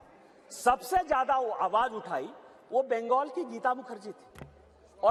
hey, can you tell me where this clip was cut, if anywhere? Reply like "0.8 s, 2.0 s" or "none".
none